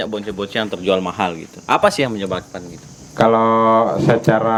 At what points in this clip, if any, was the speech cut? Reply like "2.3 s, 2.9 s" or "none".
none